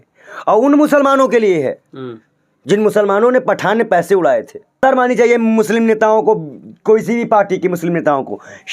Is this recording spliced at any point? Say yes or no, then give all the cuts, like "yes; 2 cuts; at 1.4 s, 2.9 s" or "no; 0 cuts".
yes; 1 cut; at 4.6 s